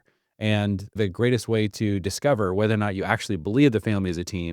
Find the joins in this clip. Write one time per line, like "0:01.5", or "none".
0:01.0